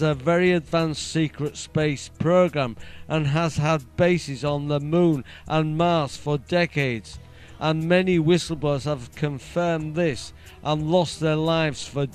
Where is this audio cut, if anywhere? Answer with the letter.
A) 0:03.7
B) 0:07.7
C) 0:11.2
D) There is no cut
B